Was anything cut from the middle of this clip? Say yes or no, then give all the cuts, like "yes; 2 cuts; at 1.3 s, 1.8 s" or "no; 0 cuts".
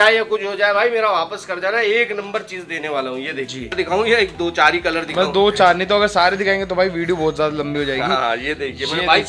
yes; 1 cut; at 3.7 s